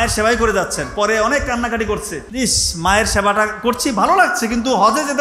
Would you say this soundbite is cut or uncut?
cut